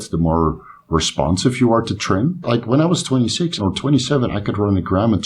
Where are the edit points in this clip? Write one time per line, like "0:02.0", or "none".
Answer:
0:02.4
0:03.6